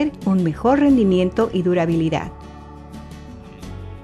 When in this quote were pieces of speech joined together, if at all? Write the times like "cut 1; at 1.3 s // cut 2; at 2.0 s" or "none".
none